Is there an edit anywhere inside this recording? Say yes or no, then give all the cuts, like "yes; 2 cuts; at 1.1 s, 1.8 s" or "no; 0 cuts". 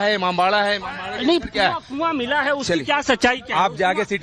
no; 0 cuts